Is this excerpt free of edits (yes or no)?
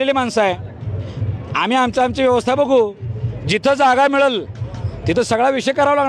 yes